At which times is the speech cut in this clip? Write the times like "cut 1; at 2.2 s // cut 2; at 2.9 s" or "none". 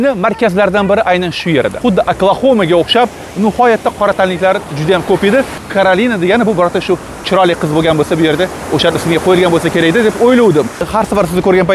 cut 1; at 1.7 s // cut 2; at 5.6 s // cut 3; at 10.8 s

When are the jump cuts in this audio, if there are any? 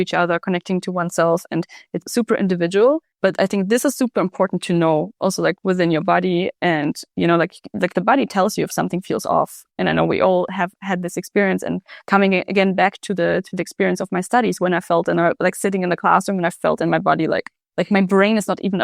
none

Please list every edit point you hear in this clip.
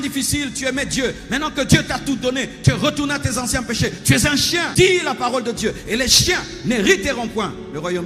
cut 1; at 4.7 s

